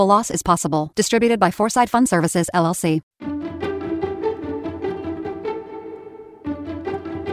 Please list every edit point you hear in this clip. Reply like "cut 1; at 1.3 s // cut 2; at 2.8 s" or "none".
cut 1; at 3.1 s